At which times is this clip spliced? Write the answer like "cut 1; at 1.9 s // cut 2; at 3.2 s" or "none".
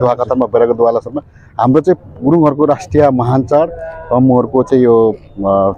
none